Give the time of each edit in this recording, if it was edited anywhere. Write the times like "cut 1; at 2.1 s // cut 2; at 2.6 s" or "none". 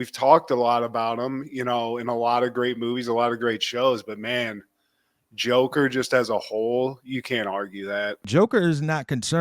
cut 1; at 8.3 s